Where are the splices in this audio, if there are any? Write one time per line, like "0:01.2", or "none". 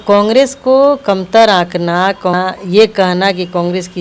0:02.3